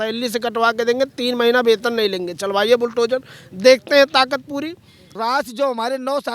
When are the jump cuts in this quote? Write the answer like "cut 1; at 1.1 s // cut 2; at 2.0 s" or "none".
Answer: cut 1; at 5.0 s